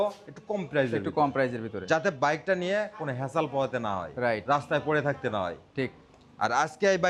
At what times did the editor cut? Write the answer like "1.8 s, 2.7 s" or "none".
none